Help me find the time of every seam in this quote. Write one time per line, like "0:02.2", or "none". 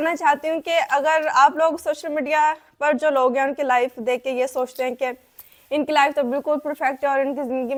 none